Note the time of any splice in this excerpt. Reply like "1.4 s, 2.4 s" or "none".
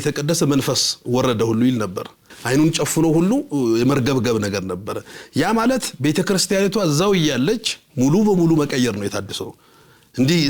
2.3 s